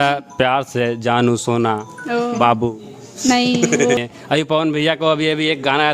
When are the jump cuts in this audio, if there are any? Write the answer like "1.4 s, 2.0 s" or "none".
4.0 s